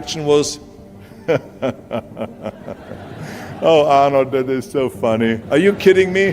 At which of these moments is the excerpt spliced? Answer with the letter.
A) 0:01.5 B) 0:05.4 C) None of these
B